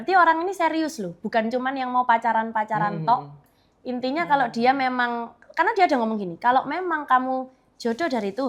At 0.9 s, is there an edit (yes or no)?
no